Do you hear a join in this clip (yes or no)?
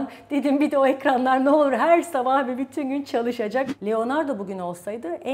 yes